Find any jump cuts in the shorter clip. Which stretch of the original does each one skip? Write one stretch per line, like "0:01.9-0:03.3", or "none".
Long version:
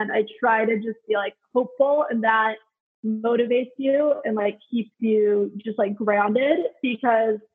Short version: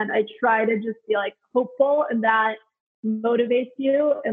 none

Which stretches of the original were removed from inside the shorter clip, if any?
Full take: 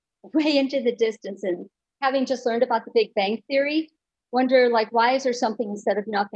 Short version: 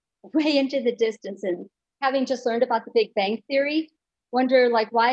none

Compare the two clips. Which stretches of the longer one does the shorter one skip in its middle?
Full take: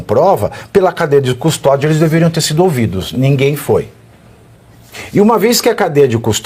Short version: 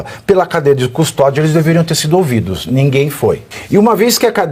0:04.0-0:05.0

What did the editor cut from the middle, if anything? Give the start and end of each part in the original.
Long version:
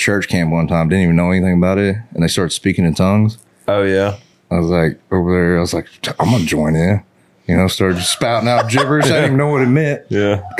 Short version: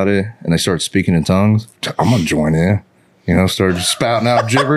0:03.5-0:06.0

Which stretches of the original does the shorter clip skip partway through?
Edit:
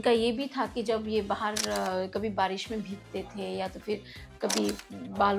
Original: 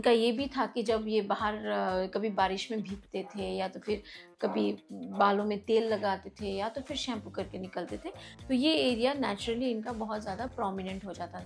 none

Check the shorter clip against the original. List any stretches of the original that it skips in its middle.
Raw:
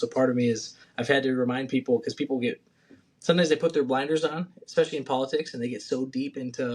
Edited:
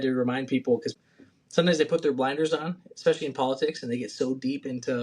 0:02.1-0:02.6

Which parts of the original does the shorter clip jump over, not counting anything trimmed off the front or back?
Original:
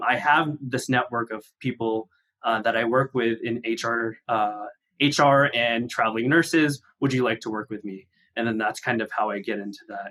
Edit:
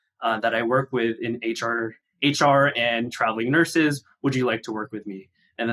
0:04.2-0:04.7

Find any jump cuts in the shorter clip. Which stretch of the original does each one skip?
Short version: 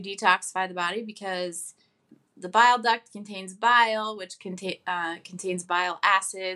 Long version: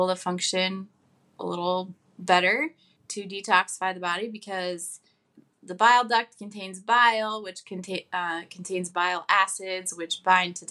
none

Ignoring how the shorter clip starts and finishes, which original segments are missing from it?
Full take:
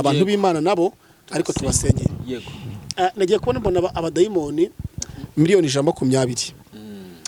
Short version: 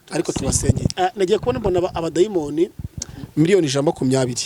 0:02.1-0:02.9

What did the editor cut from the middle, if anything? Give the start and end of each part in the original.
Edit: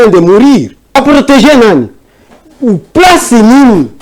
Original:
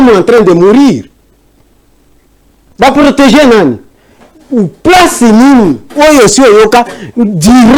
0:01.3-0:02.9

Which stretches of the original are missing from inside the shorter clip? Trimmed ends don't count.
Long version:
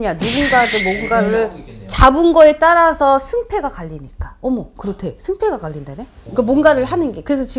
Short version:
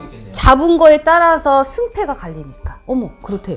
none

